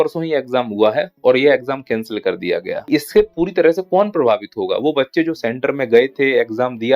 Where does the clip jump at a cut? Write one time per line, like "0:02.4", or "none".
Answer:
0:02.9

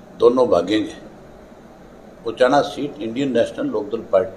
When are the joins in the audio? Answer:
none

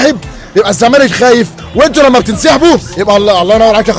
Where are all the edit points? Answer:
0:01.6

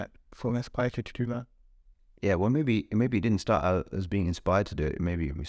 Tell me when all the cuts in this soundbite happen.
none

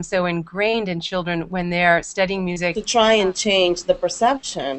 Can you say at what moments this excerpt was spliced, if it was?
0:02.8

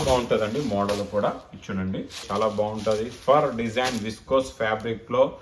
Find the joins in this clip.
0:02.2

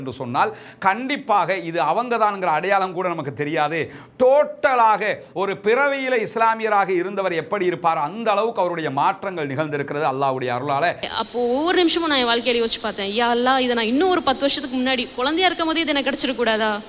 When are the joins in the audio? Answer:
0:11.0

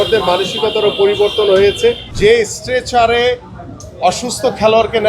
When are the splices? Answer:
0:02.1

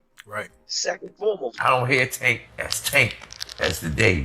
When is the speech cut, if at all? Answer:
0:01.5

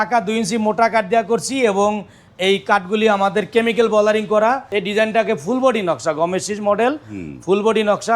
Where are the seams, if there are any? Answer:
0:04.7

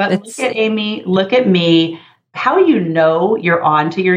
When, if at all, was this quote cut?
0:02.3

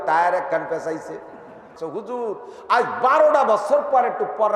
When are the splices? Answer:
0:01.8

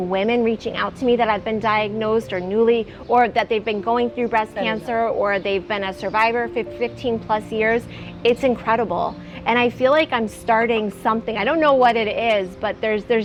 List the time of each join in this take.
none

